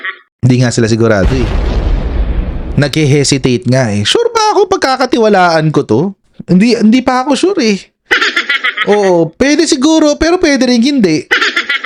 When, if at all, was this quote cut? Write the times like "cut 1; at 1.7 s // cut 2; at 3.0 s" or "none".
none